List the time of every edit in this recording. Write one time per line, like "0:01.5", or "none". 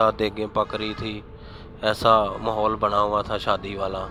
none